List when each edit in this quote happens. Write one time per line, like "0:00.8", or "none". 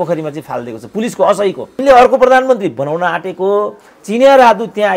0:01.8

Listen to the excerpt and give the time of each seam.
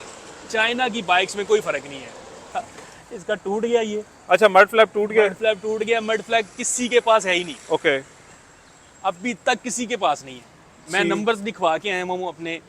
0:02.4

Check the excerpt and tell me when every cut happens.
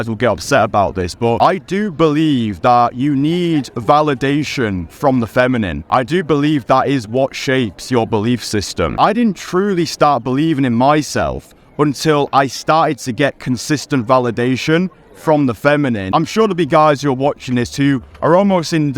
0:01.4
0:05.8
0:08.9
0:16.0

